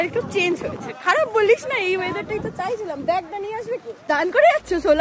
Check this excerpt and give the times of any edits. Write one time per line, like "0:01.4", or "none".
0:03.9